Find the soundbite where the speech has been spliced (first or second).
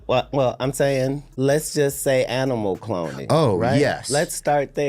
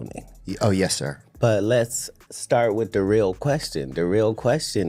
first